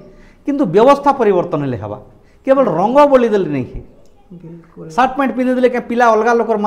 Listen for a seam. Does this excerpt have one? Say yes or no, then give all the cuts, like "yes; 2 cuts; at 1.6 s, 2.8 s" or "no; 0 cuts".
no; 0 cuts